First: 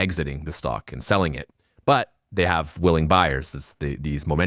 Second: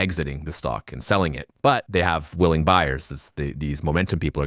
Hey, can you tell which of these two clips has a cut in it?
second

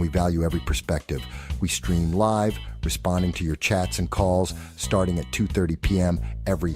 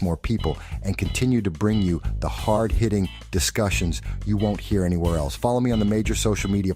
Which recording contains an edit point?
first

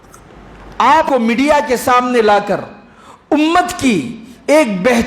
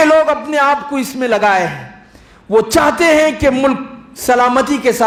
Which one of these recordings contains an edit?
first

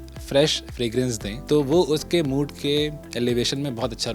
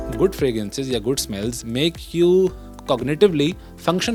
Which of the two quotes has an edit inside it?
first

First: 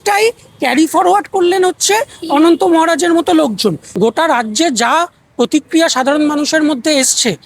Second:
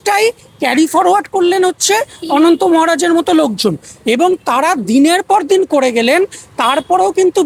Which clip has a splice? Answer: first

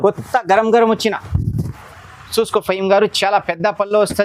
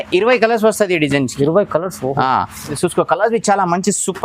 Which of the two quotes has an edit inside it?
second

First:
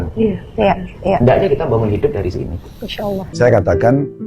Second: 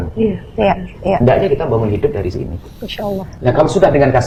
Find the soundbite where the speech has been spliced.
first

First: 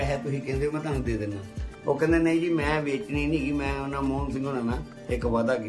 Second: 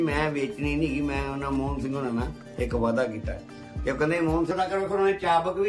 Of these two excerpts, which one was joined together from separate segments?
second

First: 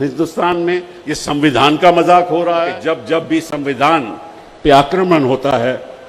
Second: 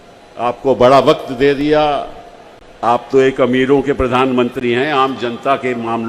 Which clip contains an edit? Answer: first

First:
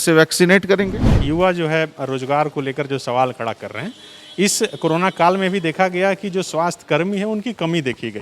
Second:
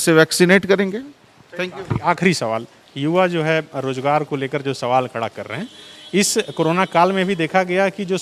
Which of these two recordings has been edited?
first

